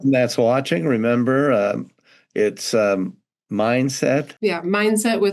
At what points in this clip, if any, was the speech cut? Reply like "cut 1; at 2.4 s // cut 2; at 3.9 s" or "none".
cut 1; at 4.3 s